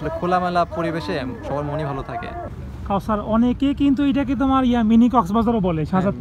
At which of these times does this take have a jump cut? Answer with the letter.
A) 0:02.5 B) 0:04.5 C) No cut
A